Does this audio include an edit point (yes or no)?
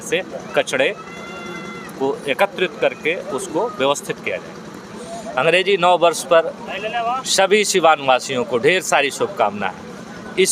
yes